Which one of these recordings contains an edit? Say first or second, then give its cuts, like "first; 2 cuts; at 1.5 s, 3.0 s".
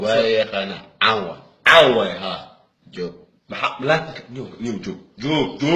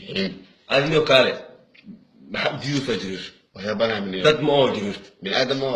second; 1 cut; at 2.6 s